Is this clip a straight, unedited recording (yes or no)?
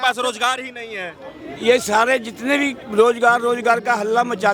yes